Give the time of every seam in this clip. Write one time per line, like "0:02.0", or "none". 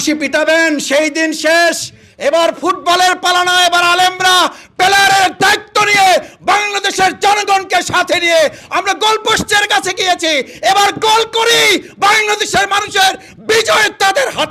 none